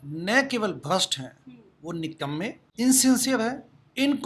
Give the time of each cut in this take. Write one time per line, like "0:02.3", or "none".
0:02.6